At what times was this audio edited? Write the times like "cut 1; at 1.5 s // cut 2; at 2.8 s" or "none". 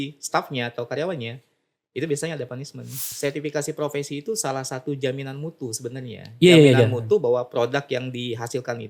cut 1; at 3.1 s